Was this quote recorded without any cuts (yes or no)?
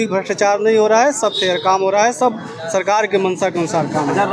yes